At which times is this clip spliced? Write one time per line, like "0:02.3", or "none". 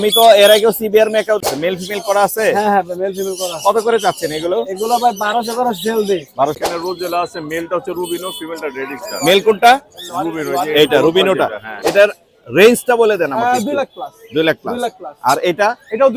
0:01.5
0:06.6
0:11.7